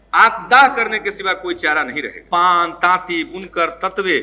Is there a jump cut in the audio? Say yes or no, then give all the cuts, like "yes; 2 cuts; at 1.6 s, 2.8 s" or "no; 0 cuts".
yes; 1 cut; at 2.2 s